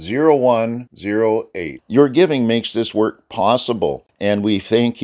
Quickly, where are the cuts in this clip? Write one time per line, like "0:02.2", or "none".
0:04.1